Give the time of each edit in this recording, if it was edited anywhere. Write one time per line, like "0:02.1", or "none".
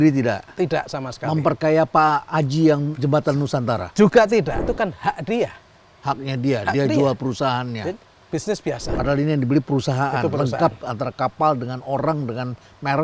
0:04.6
0:08.9